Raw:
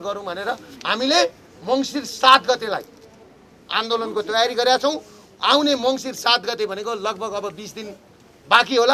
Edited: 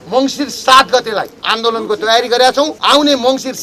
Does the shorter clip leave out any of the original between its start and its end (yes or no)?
yes